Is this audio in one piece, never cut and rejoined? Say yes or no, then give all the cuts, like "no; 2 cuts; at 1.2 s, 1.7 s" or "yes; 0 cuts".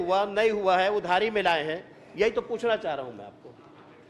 yes; 0 cuts